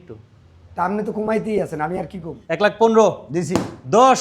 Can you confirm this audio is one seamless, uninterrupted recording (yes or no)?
no